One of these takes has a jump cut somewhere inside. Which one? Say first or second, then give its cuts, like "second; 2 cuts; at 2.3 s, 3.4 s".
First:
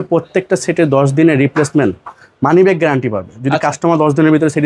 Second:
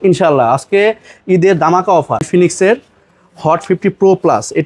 second; 1 cut; at 2.3 s